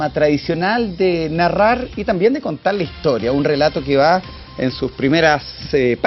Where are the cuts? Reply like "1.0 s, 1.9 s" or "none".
3.4 s